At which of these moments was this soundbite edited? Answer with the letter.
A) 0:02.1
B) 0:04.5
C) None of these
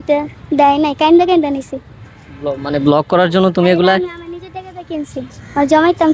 C